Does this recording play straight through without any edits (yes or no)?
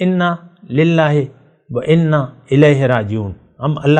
yes